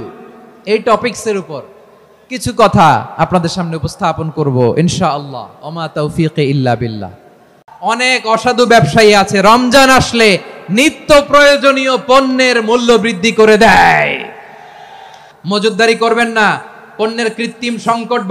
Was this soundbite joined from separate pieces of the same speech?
yes; 2 cuts; at 7.6 s, 15.2 s

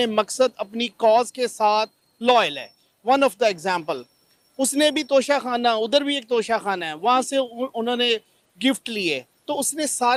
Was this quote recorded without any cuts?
yes; 0 cuts

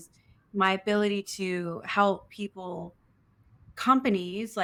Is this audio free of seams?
yes; 0 cuts

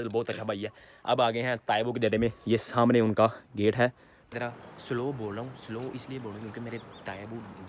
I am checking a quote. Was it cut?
yes; 1 cut; at 4.2 s

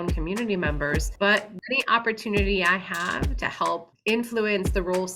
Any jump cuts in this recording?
yes; 2 cuts; at 1.5 s, 3.9 s

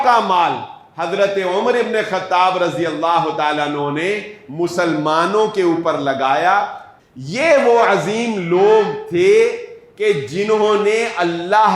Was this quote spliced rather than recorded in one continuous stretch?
yes; 1 cut; at 6.9 s

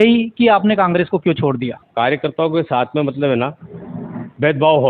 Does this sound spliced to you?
yes; 1 cut; at 1.8 s

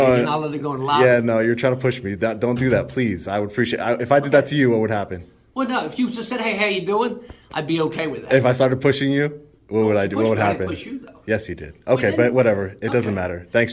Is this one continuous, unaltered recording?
yes; 0 cuts

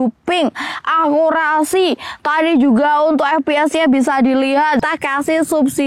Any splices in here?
yes; 1 cut; at 4.8 s

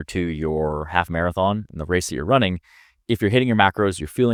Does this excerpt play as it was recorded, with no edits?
yes; 0 cuts

